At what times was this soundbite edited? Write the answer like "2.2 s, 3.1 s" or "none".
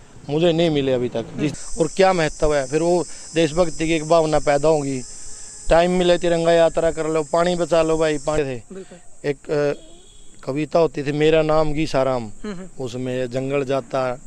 1.5 s, 8.4 s

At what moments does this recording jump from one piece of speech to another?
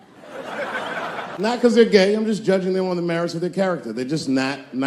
1.5 s

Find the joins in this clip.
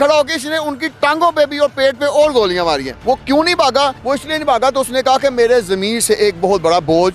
2.9 s, 4.0 s

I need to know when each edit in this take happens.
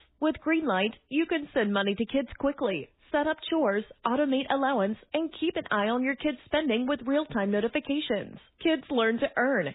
none

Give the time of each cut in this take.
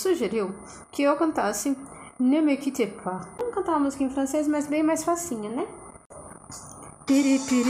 3.4 s, 5.9 s

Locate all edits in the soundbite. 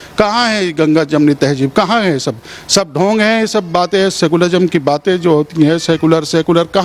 none

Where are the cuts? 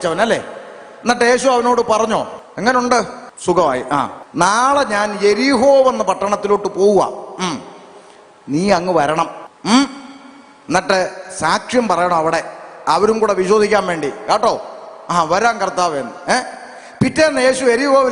2.4 s, 3.2 s, 4.2 s, 9.5 s

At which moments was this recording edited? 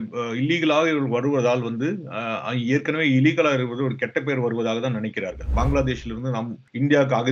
5.4 s

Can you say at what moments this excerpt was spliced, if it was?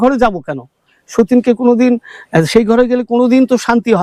none

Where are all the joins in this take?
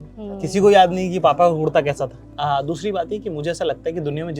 2.2 s

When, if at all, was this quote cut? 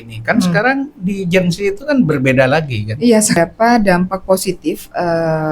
3.4 s

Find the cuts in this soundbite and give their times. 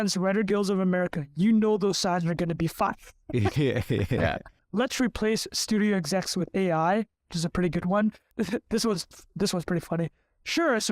4.6 s

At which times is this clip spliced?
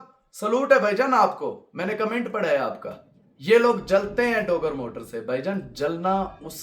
none

